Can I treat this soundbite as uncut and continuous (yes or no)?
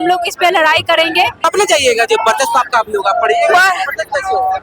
no